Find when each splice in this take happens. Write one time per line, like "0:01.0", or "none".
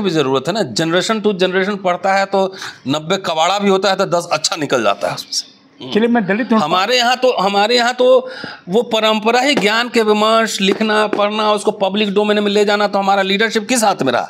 none